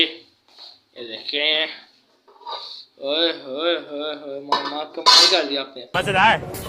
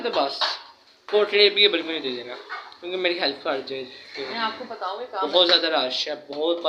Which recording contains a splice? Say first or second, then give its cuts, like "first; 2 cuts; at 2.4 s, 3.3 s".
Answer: first; 1 cut; at 5.8 s